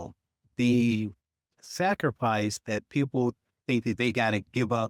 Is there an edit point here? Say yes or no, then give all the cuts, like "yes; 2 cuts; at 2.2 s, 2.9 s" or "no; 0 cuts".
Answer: no; 0 cuts